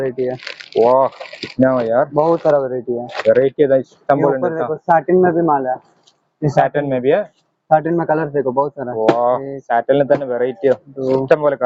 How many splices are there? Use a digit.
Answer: 0